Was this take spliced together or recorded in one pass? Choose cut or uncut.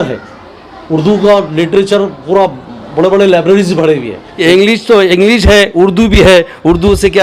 cut